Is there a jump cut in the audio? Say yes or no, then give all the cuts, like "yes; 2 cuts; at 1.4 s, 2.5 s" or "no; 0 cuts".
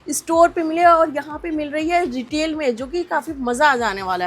no; 0 cuts